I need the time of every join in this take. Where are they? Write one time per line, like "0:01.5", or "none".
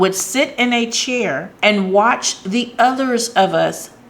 0:01.5